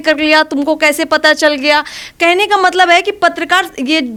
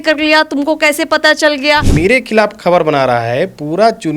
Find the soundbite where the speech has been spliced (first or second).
second